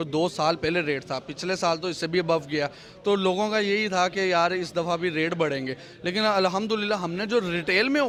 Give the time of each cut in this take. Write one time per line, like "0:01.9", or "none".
none